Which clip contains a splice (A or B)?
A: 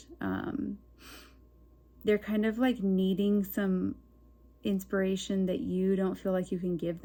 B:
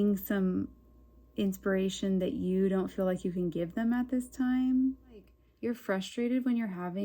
B